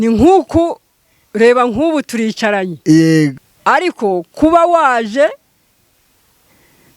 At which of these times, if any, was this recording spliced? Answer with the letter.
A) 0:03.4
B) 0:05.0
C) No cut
A